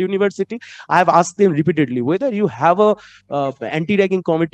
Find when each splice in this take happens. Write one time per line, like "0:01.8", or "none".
none